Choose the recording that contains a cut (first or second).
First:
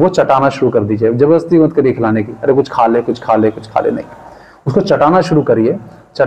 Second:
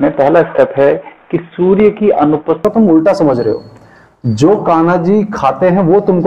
second